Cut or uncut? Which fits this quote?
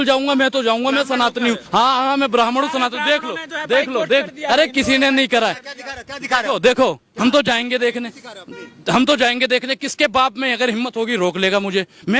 cut